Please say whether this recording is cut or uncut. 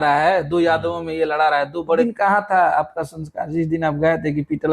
cut